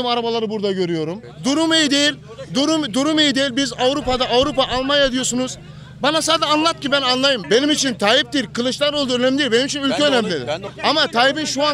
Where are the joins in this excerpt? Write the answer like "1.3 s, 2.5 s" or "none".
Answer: 1.3 s, 7.4 s, 10.6 s